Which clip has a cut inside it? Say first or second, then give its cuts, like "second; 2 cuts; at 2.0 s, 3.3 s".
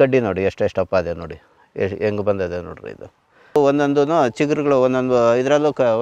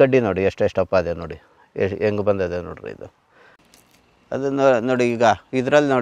first; 1 cut; at 3.6 s